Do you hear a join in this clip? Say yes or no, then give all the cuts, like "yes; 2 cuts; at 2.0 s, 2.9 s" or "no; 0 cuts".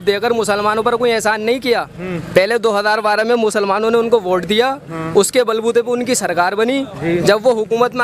no; 0 cuts